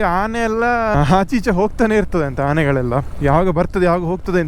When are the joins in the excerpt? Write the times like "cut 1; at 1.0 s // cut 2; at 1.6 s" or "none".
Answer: cut 1; at 1.0 s